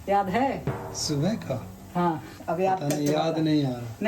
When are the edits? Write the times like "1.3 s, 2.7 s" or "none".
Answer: 2.3 s